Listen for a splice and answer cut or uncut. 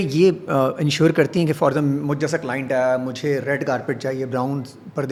uncut